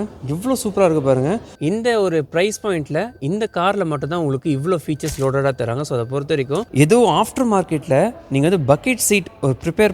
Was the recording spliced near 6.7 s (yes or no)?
yes